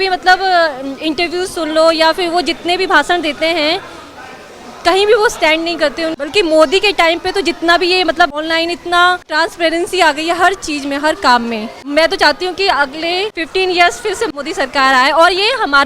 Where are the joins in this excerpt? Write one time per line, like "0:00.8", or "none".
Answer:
0:06.2
0:08.4
0:09.3
0:11.8
0:13.4
0:14.3